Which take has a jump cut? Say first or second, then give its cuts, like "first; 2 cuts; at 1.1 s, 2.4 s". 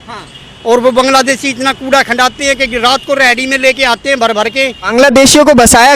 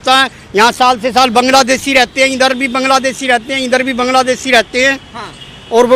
first; 1 cut; at 4.8 s